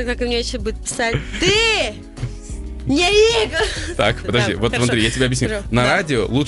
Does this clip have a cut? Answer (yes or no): no